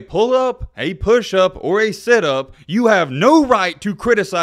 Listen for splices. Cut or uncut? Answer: uncut